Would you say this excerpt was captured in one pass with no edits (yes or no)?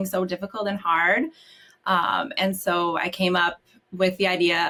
yes